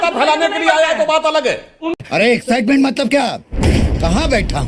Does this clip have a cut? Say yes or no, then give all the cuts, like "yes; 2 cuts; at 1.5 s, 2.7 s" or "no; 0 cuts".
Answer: no; 0 cuts